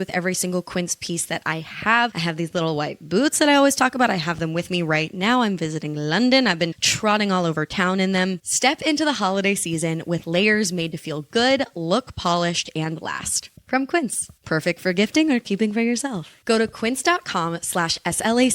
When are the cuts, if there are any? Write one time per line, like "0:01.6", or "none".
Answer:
0:02.2
0:08.4